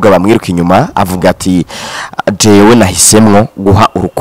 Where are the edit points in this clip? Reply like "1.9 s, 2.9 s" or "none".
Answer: none